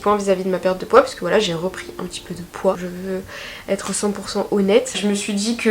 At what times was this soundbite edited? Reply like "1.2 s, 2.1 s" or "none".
2.8 s, 4.9 s